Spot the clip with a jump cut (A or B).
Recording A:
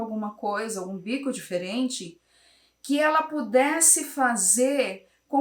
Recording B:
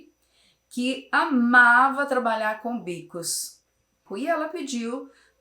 B